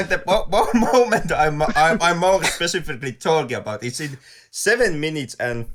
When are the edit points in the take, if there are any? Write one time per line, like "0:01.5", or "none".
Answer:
none